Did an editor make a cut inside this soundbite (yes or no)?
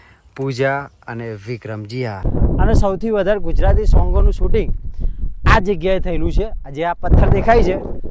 yes